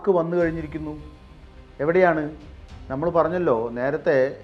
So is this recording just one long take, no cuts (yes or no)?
yes